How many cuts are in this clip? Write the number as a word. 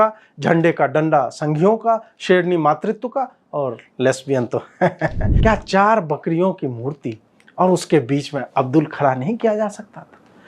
one